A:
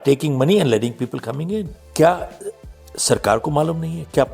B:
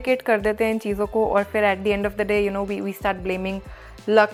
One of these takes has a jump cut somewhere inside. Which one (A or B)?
A